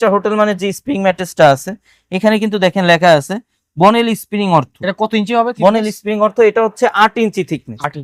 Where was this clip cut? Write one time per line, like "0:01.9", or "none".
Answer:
none